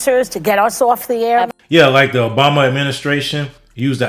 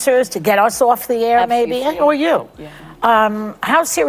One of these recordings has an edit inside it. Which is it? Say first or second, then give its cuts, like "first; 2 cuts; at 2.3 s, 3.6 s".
second; 1 cut; at 1.6 s